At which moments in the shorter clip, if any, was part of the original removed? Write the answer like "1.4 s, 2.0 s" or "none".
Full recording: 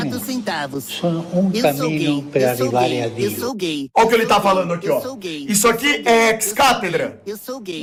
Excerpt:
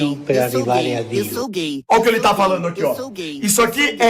none